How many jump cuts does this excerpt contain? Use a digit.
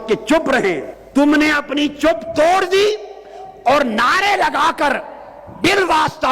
1